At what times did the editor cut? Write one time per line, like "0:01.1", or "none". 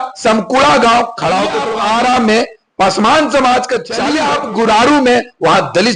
0:01.6
0:04.0

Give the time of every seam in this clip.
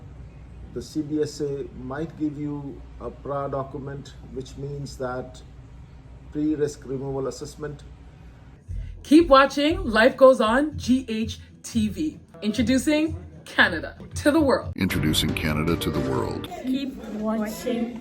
0:08.6
0:12.3
0:14.7
0:16.5

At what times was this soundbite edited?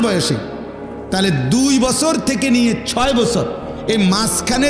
none

